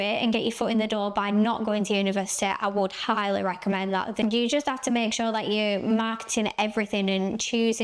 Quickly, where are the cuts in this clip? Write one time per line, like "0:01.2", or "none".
0:04.2